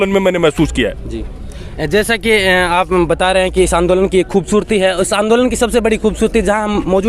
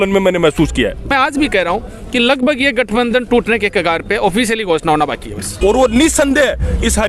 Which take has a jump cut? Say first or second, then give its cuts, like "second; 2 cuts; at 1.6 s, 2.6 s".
second; 2 cuts; at 1.1 s, 5.5 s